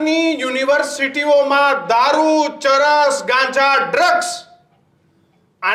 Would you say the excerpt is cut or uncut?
uncut